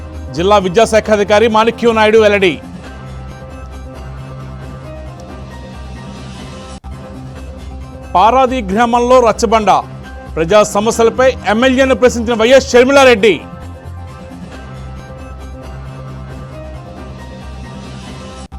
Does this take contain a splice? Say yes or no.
no